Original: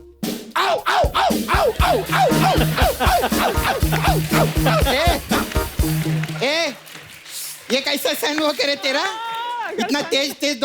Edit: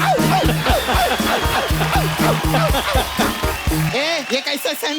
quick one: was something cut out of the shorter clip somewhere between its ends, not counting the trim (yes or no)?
yes